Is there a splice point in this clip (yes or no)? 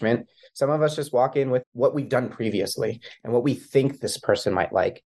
yes